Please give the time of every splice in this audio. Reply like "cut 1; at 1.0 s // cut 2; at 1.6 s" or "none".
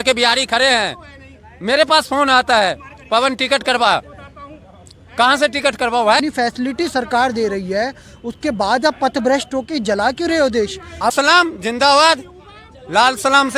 cut 1; at 6.2 s // cut 2; at 11.1 s